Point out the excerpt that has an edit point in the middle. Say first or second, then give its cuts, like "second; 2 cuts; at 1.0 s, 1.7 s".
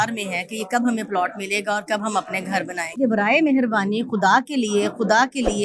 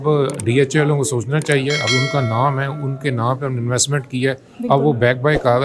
first; 1 cut; at 3.0 s